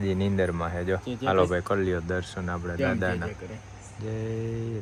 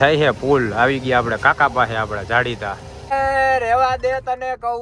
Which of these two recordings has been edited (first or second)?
second